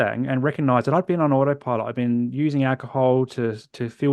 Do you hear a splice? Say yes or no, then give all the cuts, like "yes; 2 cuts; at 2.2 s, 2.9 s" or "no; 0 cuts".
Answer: no; 0 cuts